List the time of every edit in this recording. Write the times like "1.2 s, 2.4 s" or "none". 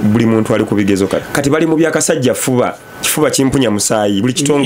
1.2 s